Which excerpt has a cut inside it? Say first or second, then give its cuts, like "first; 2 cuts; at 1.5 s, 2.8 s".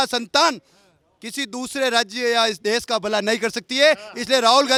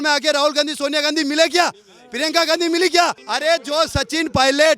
second; 1 cut; at 3.3 s